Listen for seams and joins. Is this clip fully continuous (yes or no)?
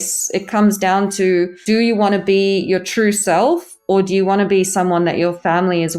no